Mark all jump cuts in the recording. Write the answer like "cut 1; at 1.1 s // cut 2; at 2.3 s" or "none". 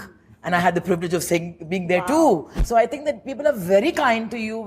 cut 1; at 2.5 s